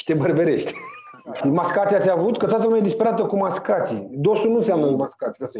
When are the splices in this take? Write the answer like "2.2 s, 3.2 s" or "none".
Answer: 1.4 s